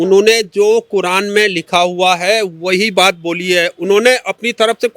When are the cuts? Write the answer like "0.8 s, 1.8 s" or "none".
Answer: none